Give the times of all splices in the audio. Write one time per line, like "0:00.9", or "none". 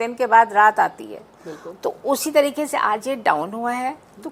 none